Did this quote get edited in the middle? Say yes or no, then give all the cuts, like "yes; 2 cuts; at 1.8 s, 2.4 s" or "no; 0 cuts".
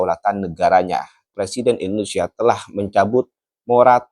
yes; 1 cut; at 1.3 s